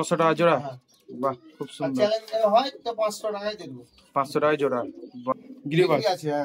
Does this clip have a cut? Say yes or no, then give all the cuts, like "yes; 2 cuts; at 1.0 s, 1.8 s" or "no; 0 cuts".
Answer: yes; 1 cut; at 5.3 s